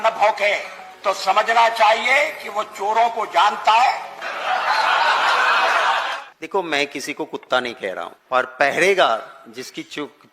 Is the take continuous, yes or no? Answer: no